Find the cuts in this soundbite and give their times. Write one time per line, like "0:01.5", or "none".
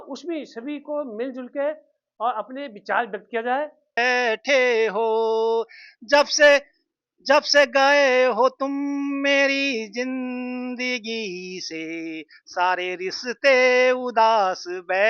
0:03.8